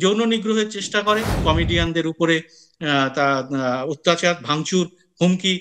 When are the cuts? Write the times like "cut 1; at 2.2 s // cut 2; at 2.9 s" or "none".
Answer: cut 1; at 1.4 s